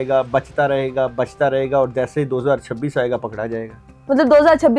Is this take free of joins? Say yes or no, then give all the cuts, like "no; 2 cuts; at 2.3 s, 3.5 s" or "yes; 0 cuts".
yes; 0 cuts